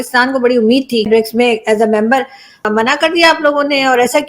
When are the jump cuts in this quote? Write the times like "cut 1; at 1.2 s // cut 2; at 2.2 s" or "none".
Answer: cut 1; at 1.1 s // cut 2; at 2.6 s